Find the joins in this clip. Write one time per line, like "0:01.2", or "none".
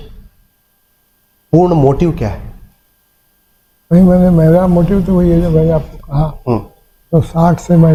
none